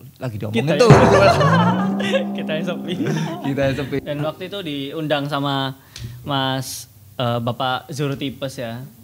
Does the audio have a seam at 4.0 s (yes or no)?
yes